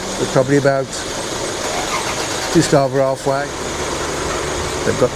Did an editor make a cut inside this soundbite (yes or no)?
yes